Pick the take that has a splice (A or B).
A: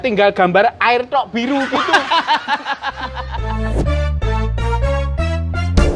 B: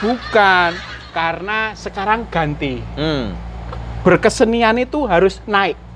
A